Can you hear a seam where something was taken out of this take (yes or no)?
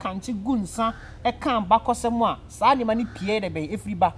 no